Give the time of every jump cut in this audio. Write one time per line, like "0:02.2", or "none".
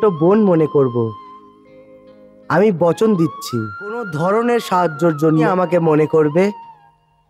0:04.1
0:05.5